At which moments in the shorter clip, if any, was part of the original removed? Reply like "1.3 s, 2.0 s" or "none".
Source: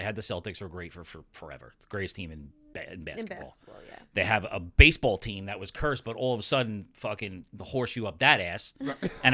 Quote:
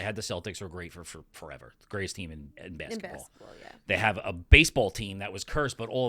2.6 s